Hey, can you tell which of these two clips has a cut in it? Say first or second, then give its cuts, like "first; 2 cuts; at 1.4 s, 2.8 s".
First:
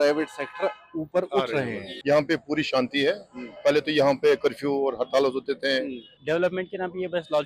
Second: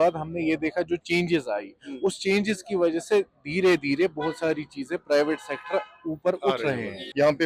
first; 1 cut; at 6.0 s